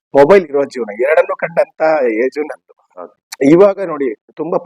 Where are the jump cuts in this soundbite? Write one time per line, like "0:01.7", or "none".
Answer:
0:03.2